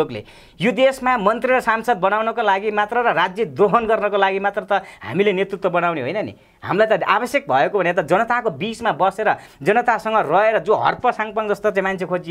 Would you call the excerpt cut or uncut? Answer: uncut